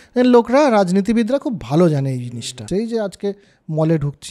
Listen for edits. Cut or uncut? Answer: cut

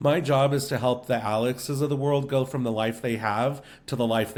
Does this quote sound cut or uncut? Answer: uncut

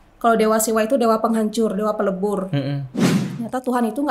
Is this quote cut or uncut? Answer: cut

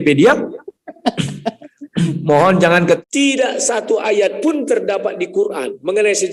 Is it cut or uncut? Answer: cut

